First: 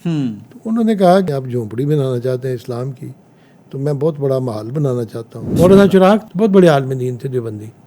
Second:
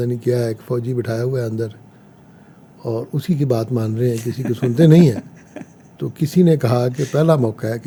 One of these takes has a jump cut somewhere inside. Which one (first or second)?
first